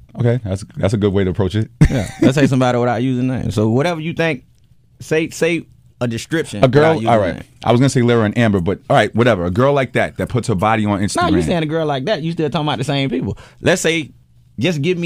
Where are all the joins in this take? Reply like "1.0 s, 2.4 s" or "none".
13.7 s